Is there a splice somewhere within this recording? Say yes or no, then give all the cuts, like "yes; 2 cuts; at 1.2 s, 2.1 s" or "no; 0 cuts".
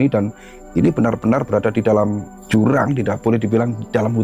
yes; 1 cut; at 2.3 s